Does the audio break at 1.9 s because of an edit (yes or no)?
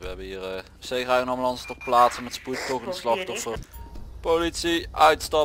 no